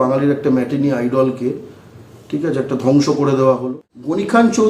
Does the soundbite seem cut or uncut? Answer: cut